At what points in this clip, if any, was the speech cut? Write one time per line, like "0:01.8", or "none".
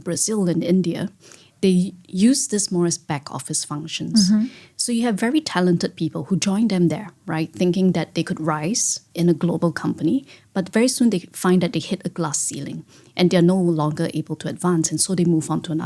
none